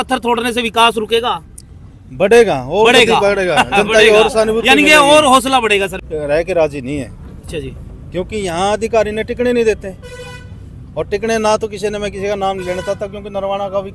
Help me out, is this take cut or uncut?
cut